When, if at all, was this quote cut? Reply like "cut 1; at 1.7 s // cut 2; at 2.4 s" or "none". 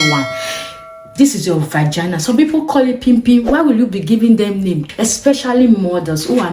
cut 1; at 4.9 s